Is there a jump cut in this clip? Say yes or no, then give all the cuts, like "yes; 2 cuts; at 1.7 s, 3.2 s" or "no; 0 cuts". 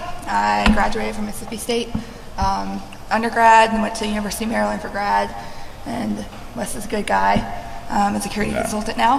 yes; 1 cut; at 4.1 s